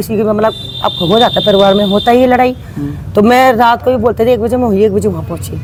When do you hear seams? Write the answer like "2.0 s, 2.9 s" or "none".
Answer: none

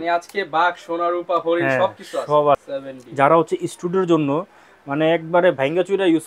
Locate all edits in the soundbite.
2.6 s

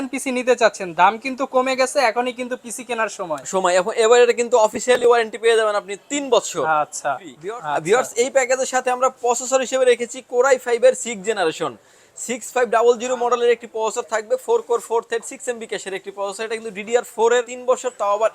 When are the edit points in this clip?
7.3 s, 17.5 s

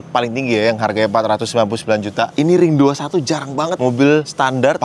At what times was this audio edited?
none

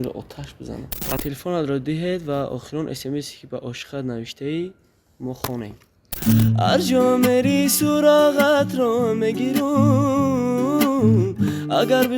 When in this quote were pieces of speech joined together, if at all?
1.2 s, 6.1 s

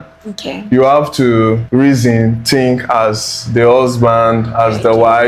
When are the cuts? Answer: 1.6 s

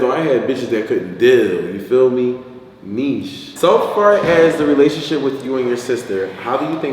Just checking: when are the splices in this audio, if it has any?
3.4 s

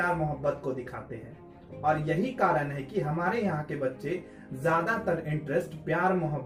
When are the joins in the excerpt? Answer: none

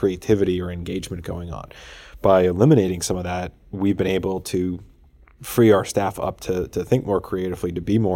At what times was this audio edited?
none

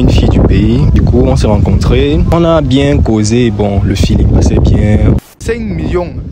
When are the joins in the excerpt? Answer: 0.9 s, 2.3 s, 5.2 s

